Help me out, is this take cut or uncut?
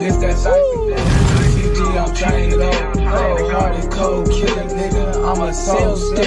uncut